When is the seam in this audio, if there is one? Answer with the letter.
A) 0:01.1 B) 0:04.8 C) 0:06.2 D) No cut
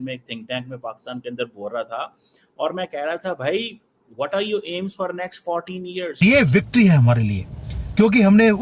C